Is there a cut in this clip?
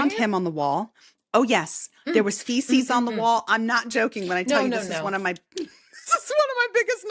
no; 0 cuts

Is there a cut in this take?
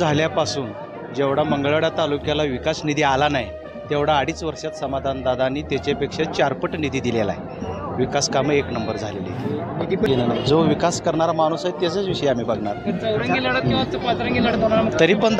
yes; 1 cut; at 10.1 s

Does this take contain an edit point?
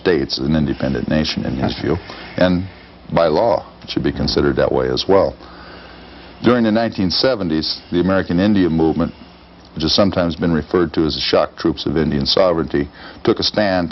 yes; 1 cut; at 4.4 s

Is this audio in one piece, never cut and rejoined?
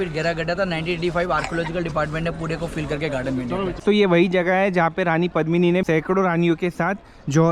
no; 2 cuts; at 3.8 s, 5.8 s

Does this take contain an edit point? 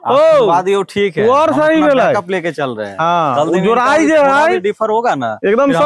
no; 0 cuts

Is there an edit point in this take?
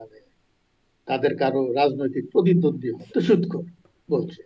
yes; 1 cut; at 2.9 s

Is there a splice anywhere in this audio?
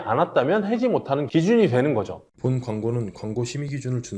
yes; 1 cut; at 2.3 s

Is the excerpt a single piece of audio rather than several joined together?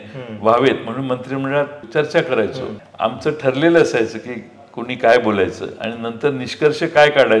no; 2 cuts; at 1.8 s, 2.8 s

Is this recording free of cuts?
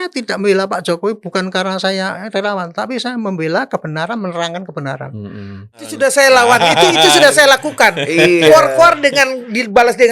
no; 1 cut; at 5.9 s

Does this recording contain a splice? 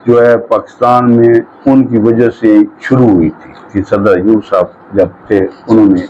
yes; 1 cut; at 3.8 s

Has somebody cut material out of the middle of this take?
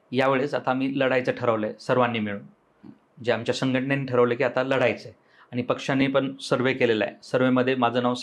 no; 0 cuts

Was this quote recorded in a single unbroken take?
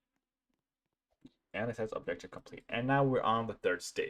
yes; 0 cuts

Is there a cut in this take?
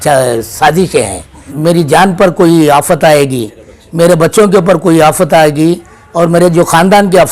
yes; 1 cut; at 1.5 s

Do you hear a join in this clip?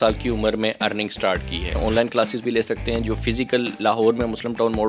yes; 1 cut; at 1.8 s

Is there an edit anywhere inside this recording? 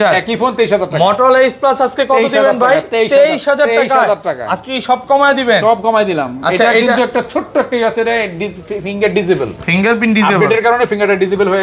no; 0 cuts

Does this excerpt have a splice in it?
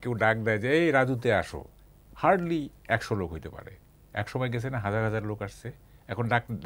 no; 0 cuts

